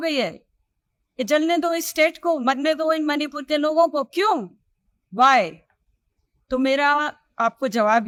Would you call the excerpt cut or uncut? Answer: uncut